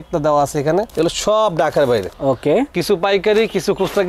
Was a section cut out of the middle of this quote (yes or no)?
no